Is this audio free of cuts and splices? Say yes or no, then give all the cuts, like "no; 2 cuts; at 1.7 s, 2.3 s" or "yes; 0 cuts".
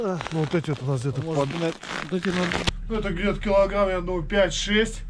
no; 1 cut; at 2.7 s